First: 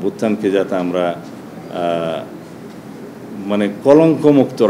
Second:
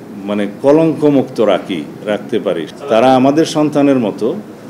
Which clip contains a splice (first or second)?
second